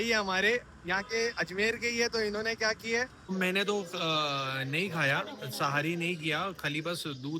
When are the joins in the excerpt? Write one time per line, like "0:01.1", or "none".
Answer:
0:03.3